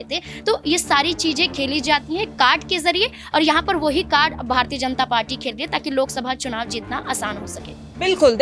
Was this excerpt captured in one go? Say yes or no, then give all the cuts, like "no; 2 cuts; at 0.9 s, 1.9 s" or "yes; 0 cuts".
yes; 0 cuts